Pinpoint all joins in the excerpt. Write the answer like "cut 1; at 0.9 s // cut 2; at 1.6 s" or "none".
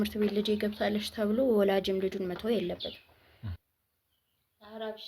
cut 1; at 3.6 s